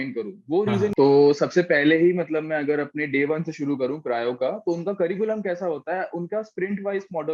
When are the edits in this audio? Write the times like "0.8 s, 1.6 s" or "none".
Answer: 0.9 s